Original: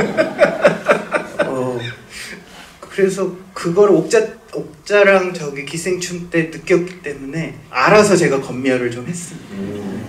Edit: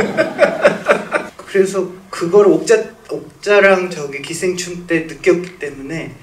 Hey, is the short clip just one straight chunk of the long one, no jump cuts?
no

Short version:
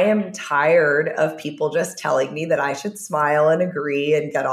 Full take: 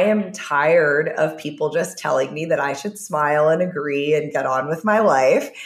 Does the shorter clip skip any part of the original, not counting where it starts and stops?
no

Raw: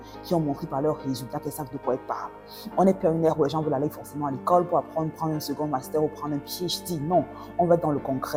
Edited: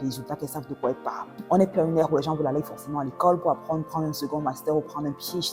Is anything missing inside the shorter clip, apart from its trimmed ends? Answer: yes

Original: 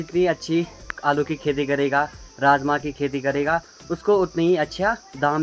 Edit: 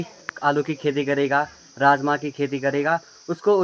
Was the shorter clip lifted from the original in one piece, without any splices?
yes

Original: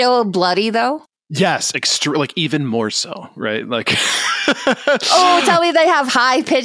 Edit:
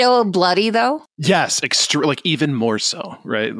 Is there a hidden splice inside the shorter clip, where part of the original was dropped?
yes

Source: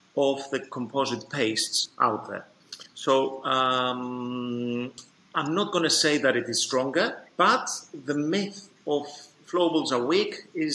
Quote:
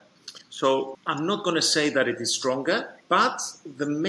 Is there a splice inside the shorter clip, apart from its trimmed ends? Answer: yes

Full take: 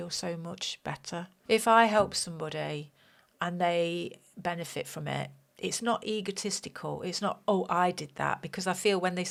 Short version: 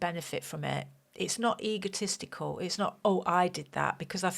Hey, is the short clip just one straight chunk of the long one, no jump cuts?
yes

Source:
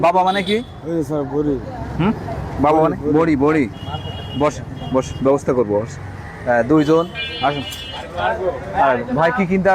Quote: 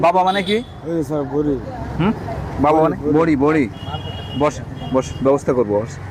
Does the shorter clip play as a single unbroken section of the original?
yes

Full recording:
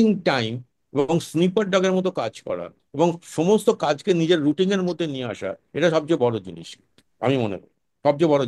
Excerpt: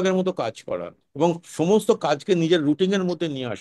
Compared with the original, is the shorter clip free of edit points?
yes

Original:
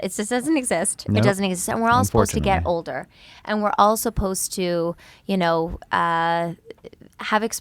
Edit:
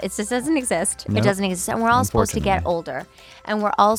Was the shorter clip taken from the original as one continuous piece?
yes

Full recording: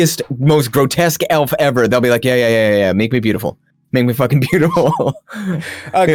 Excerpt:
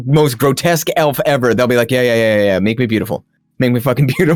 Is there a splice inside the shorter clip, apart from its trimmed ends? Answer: no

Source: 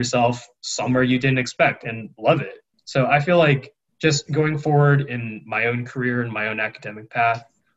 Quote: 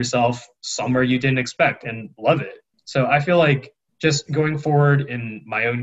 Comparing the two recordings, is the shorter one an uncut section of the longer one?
yes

